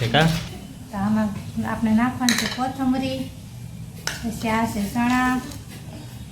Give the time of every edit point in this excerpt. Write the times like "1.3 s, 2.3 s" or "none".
1.0 s